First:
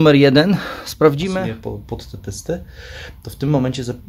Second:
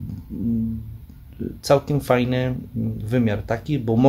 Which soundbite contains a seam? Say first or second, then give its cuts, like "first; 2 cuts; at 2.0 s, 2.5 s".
first; 1 cut; at 1.4 s